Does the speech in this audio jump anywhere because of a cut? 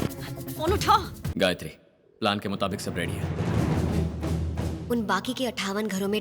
yes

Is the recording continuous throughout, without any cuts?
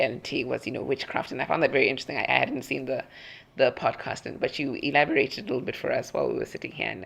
yes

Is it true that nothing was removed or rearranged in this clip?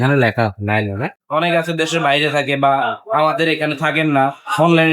no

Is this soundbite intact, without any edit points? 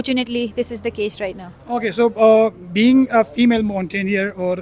yes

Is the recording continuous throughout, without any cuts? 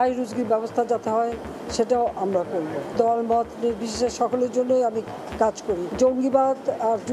no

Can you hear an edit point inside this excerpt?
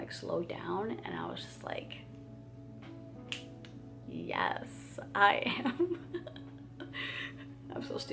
no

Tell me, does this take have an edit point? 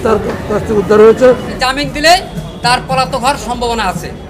yes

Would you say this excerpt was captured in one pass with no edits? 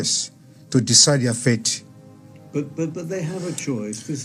yes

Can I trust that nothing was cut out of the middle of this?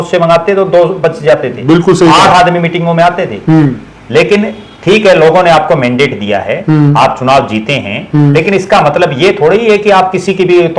yes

